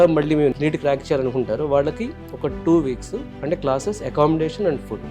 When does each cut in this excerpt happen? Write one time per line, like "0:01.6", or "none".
0:03.3